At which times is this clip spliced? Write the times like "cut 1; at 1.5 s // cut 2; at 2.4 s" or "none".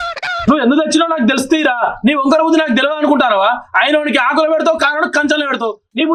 none